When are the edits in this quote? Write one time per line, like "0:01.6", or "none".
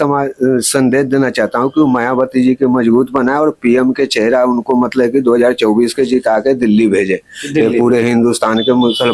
none